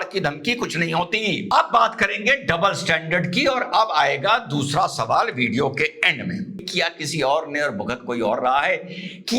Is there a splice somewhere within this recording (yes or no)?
yes